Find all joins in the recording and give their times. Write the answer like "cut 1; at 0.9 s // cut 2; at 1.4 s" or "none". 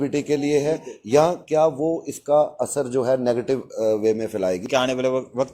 cut 1; at 4.6 s